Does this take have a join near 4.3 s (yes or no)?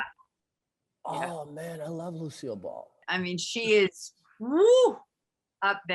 no